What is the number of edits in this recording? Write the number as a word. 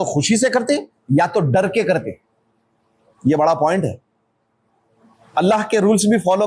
zero